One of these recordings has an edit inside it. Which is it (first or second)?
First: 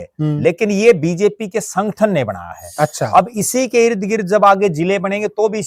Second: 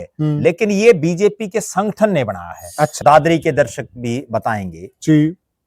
second